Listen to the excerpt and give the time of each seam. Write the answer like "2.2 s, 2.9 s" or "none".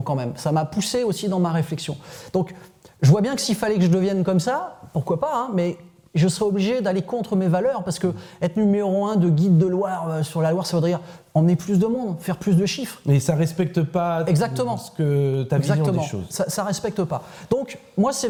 none

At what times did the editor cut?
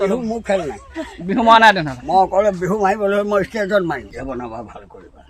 4.1 s

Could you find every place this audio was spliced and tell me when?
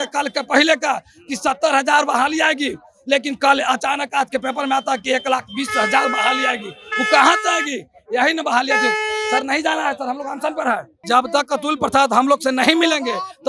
10.9 s

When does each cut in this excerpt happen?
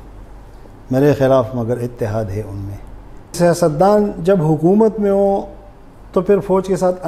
3.3 s

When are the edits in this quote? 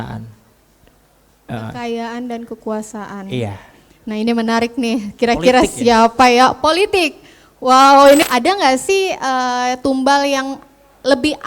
8.2 s

